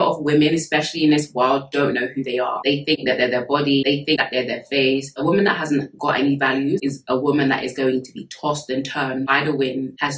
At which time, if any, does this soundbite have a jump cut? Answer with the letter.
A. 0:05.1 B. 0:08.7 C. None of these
A